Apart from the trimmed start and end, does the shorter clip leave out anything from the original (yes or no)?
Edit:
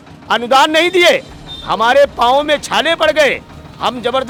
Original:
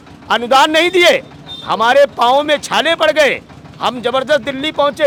no